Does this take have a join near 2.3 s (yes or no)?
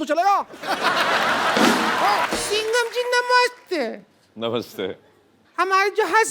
yes